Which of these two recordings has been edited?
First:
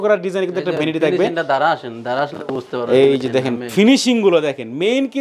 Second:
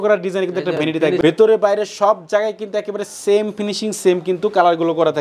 second; 1 cut; at 1.2 s

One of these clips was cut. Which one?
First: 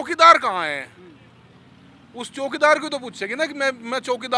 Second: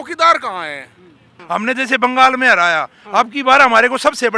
second; 1 cut; at 1.3 s

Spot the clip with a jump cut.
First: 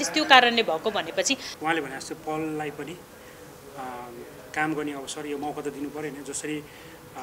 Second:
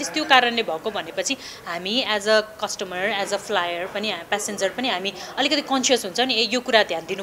first; 1 cut; at 1.5 s

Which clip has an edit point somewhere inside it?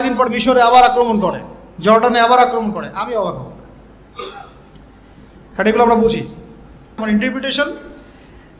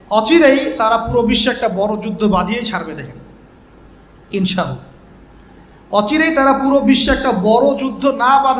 first; 1 cut; at 7.0 s

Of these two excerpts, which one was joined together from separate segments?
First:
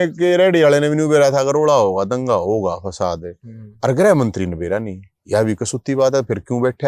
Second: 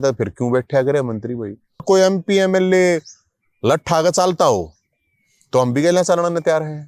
second; 1 cut; at 1.8 s

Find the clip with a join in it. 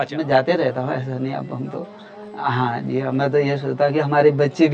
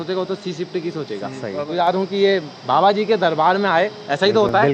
second; 1 cut; at 1.7 s

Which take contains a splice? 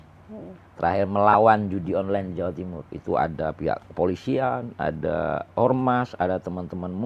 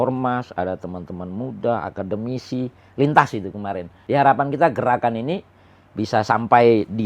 second; 1 cut; at 3.9 s

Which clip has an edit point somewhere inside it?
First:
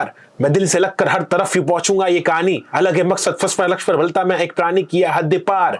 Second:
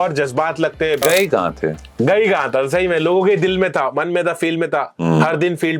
second; 1 cut; at 1.0 s

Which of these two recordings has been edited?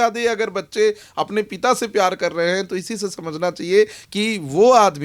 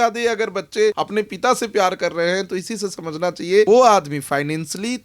second; 2 cuts; at 1.0 s, 3.7 s

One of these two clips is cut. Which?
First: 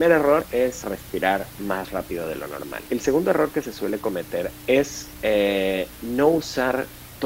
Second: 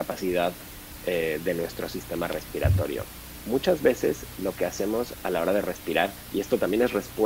first; 3 cuts; at 0.8 s, 2.8 s, 4.5 s

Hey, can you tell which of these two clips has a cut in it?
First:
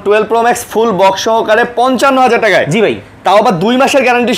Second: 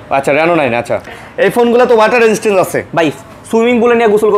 second; 1 cut; at 1.2 s

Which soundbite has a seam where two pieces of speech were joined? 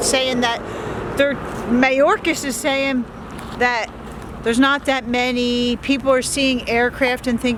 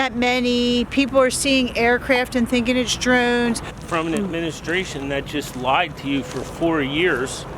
second; 1 cut; at 3.7 s

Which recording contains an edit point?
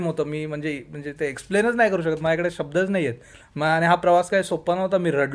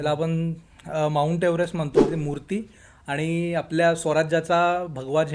second; 1 cut; at 2.1 s

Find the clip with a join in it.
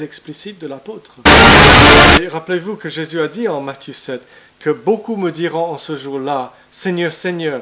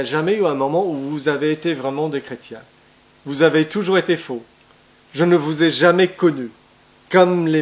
first; 2 cuts; at 1.2 s, 2.2 s

